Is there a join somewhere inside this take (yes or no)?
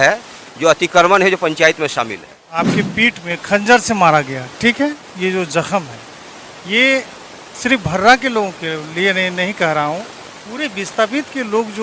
yes